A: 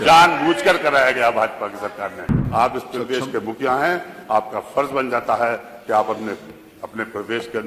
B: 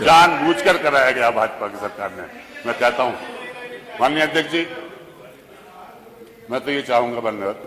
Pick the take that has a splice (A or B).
A